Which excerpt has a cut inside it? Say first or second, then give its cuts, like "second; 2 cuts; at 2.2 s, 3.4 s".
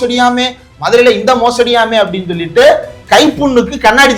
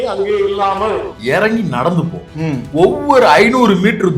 second; 1 cut; at 1.1 s